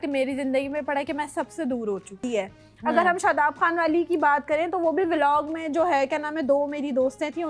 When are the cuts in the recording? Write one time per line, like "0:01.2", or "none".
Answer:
0:02.2